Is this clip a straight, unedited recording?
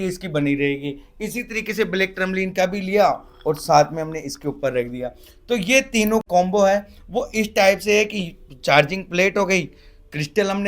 no; 1 cut; at 6.2 s

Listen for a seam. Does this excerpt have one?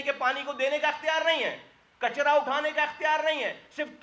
no; 0 cuts

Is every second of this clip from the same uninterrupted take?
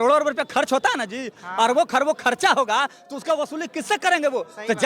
no; 1 cut; at 1.4 s

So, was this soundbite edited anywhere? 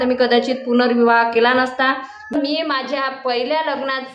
yes; 1 cut; at 2.3 s

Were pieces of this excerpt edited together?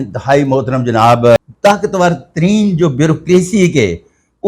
yes; 1 cut; at 1.4 s

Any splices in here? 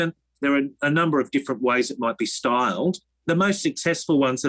yes; 1 cut; at 3.1 s

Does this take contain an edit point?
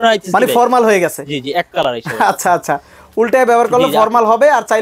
no; 0 cuts

